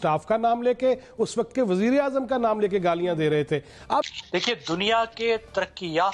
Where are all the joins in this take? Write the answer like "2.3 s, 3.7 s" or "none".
4.0 s

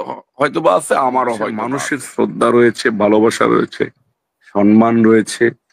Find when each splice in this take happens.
1.7 s

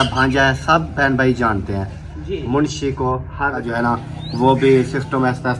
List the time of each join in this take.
3.6 s

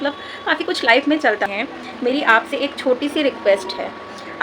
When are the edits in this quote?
1.5 s

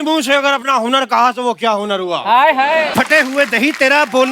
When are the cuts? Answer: 2.9 s

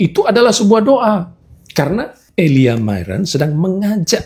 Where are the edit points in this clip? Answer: 2.2 s

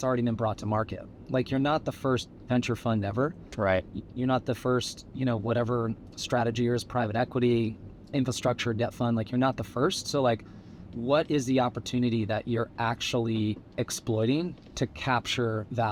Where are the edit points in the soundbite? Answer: none

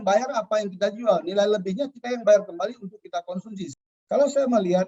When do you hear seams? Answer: 3.7 s

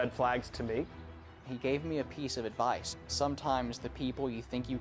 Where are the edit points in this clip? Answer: 0.9 s

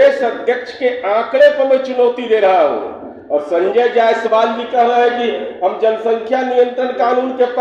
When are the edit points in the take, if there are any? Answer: none

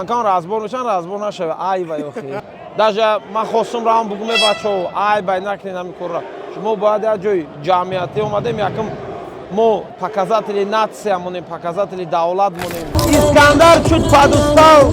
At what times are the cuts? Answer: 2.4 s, 10.0 s, 13.0 s

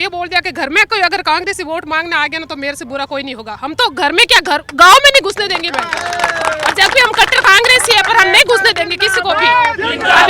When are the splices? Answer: none

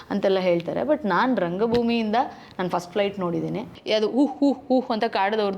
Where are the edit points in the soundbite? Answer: 3.7 s

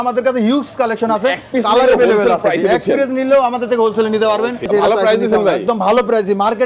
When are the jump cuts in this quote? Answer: 4.7 s

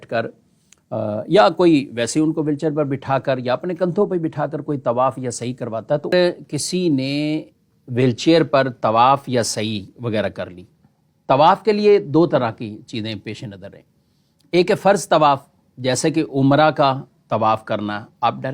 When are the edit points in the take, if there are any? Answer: 6.1 s

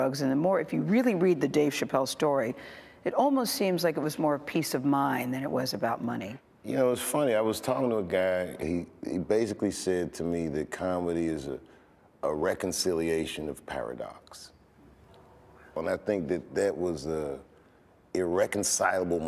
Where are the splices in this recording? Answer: 7.6 s

